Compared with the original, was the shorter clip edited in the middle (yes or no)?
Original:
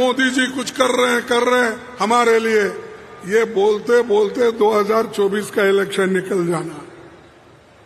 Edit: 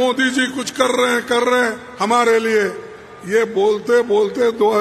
no